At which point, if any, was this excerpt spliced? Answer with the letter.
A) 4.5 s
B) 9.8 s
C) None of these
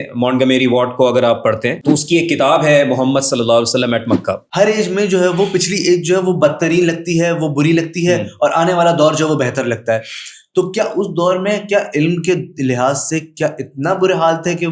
A